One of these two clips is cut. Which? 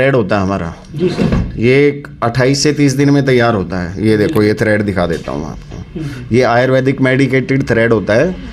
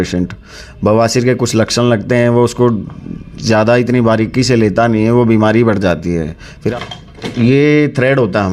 second; 1 cut; at 6.7 s

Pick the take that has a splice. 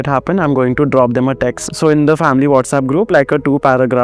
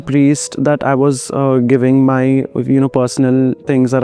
first; 2 cuts; at 1.6 s, 3.1 s

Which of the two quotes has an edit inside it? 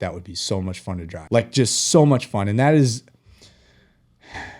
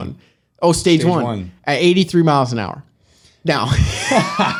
first; 1 cut; at 1.1 s

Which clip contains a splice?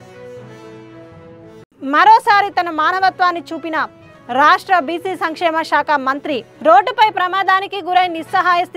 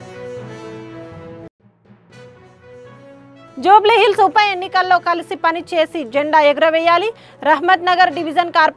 second; 1 cut; at 1.2 s

